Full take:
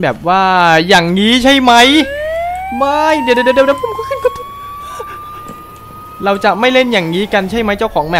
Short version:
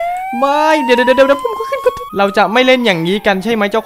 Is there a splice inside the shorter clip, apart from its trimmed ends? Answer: yes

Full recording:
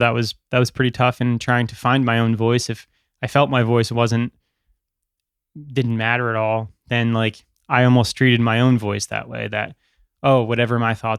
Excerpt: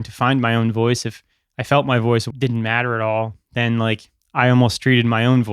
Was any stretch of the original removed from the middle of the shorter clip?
yes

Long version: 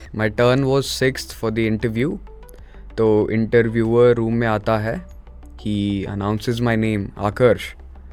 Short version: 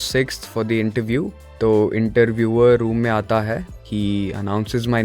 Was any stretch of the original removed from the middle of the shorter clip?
yes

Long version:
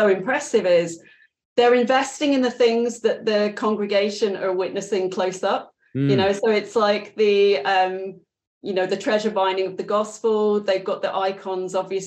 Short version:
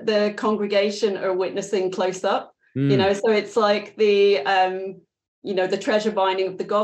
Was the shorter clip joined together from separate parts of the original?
no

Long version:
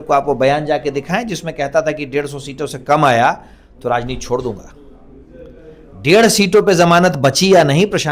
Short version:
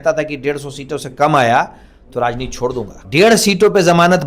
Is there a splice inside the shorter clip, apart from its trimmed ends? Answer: yes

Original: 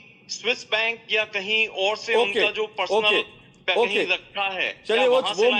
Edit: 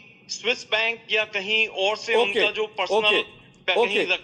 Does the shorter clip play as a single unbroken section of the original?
yes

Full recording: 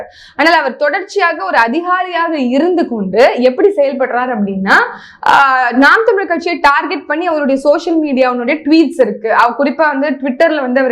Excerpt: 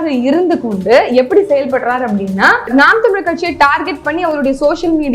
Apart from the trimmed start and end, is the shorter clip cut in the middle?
yes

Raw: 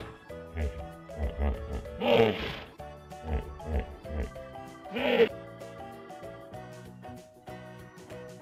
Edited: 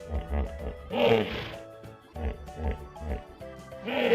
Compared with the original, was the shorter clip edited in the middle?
no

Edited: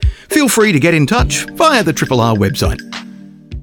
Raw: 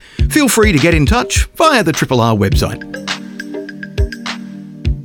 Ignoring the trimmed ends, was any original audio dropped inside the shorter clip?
yes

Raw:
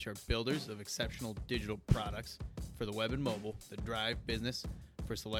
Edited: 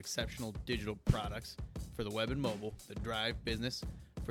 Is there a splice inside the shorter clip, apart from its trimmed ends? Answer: no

